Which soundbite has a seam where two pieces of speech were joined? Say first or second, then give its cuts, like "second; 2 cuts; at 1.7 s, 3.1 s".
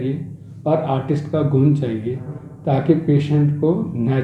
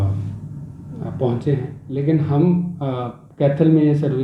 second; 1 cut; at 1.8 s